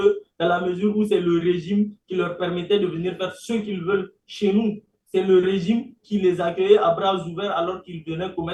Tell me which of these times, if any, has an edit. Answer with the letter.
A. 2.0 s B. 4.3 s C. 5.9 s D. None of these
D